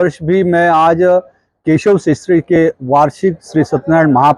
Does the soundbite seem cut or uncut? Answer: uncut